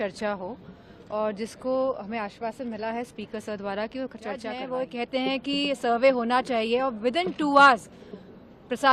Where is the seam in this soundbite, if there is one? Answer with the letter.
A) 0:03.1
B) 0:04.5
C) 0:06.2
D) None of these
B